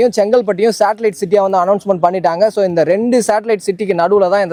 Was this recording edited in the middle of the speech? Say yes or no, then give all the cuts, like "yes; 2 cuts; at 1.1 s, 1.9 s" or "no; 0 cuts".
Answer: no; 0 cuts